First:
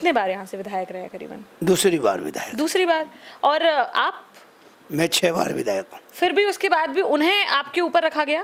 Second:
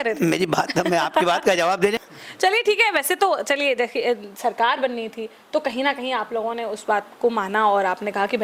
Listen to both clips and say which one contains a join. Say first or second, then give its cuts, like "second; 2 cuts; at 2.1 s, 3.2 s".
second; 1 cut; at 2.0 s